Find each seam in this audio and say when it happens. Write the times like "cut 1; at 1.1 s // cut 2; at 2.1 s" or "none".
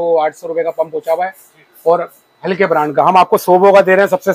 none